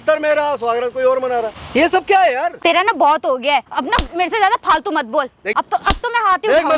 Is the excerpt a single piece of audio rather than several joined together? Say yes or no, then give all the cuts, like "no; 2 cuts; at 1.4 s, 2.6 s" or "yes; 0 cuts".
no; 4 cuts; at 1.6 s, 2.5 s, 3.7 s, 5.5 s